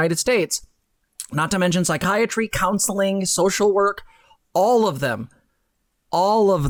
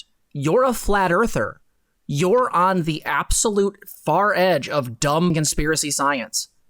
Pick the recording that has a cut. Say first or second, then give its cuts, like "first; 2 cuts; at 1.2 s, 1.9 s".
second; 1 cut; at 5.3 s